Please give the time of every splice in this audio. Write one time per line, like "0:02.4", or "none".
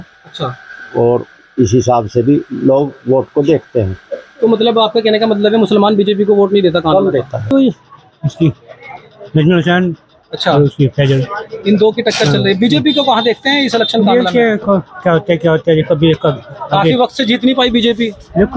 0:07.5